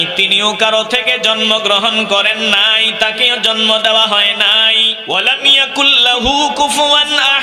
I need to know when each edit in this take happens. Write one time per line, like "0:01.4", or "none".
0:04.9

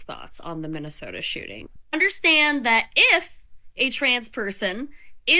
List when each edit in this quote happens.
none

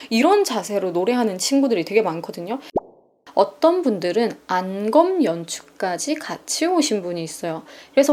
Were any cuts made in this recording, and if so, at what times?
0:03.0

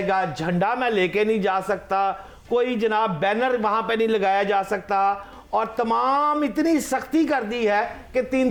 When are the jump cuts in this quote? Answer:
none

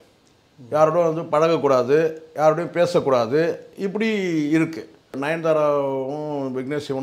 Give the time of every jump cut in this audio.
0:05.2

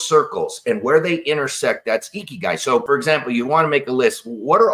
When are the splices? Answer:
0:02.8

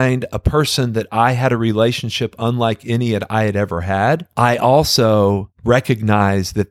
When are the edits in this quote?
0:04.3
0:05.5

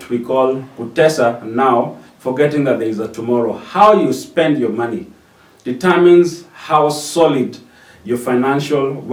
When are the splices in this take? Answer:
none

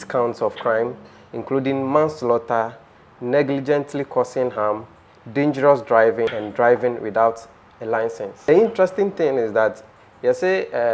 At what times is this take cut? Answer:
0:06.4
0:08.4

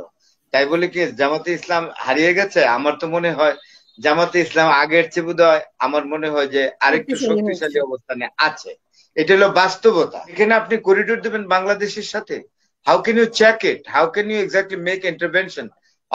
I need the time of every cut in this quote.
0:10.3

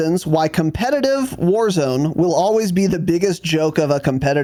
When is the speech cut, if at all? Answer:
none

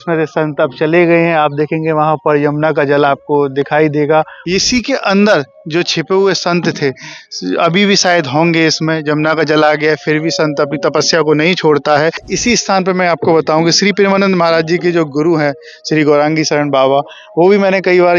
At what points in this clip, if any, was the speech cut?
0:04.4
0:12.3

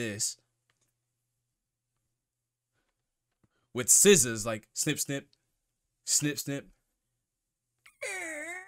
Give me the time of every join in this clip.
none

